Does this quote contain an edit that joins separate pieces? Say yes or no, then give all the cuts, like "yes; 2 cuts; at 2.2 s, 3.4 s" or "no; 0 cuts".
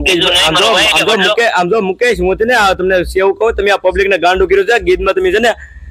no; 0 cuts